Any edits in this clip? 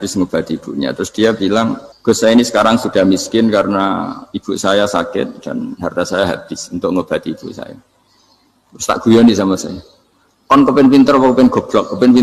yes; 1 cut; at 1.9 s

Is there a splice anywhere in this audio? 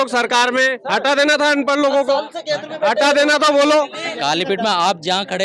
yes; 1 cut; at 4.1 s

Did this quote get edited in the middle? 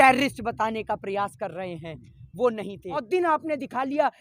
yes; 1 cut; at 3.0 s

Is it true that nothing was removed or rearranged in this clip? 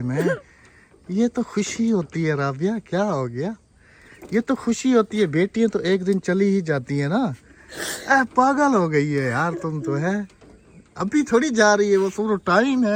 yes; 0 cuts

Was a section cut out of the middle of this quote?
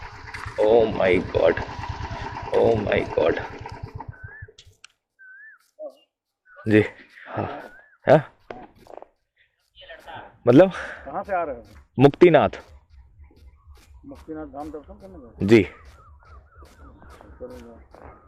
no; 0 cuts

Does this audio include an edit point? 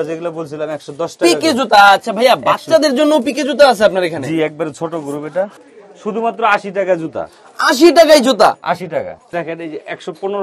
yes; 2 cuts; at 5.6 s, 9.2 s

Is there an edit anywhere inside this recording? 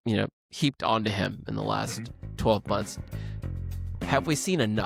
no; 0 cuts

